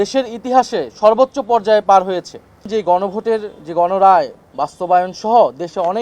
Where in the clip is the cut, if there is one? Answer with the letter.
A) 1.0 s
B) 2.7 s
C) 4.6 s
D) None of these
B